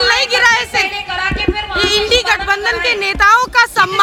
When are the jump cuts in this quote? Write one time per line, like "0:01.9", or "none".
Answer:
none